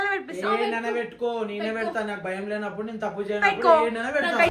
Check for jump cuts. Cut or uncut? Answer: uncut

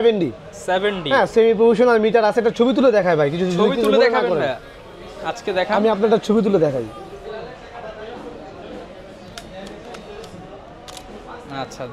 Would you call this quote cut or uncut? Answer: uncut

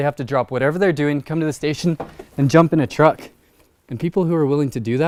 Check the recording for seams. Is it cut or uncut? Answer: uncut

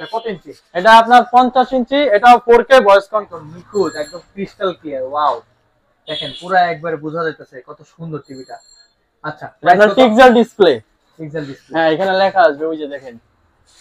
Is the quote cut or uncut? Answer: cut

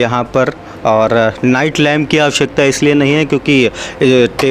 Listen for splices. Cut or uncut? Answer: uncut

